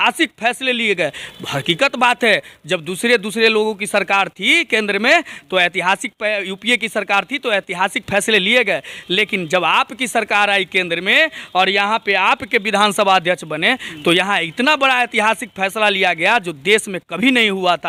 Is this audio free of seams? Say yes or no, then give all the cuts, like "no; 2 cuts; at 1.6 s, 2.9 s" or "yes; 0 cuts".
yes; 0 cuts